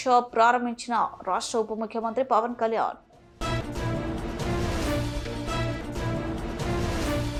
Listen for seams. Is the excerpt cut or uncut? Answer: uncut